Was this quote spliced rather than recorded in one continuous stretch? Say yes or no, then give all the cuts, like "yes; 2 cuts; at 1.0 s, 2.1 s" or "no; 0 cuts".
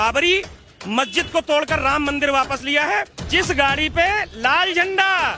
yes; 1 cut; at 3.2 s